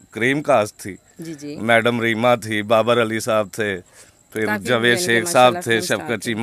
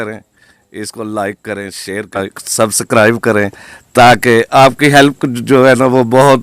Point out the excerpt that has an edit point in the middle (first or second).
second